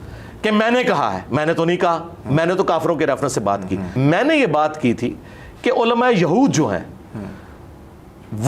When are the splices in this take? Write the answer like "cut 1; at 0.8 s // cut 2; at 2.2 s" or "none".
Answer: cut 1; at 4.0 s